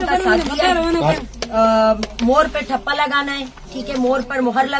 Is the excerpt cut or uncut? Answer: uncut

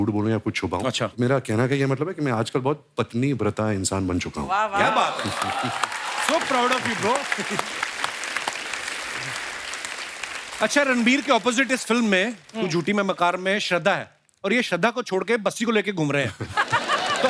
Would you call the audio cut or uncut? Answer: uncut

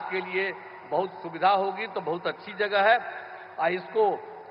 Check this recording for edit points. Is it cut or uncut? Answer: uncut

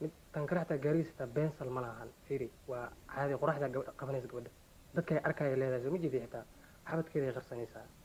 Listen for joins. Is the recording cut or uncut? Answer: uncut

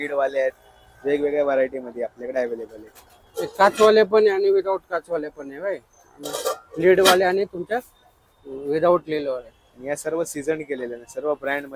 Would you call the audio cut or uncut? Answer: uncut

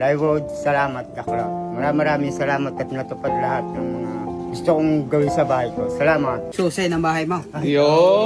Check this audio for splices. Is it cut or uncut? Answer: cut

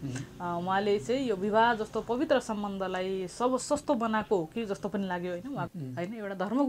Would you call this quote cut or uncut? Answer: cut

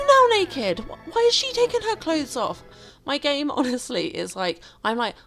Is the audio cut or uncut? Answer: uncut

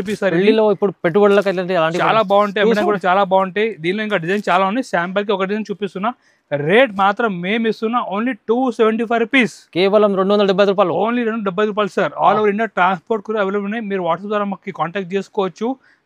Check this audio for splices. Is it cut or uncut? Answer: uncut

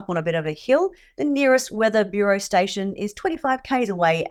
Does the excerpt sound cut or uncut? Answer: uncut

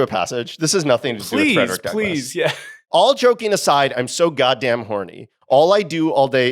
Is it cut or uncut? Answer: cut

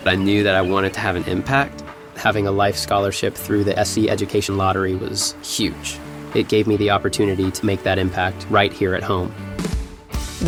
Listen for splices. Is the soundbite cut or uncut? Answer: uncut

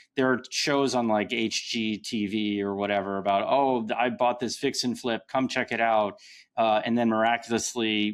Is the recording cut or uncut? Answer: uncut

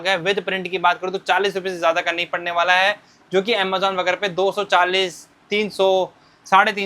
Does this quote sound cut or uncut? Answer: uncut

